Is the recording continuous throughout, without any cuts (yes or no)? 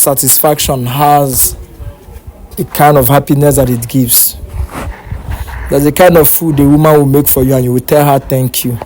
yes